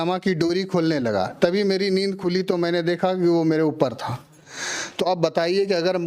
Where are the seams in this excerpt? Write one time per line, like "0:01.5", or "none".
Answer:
none